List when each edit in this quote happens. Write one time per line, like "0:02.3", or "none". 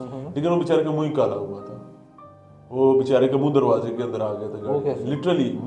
none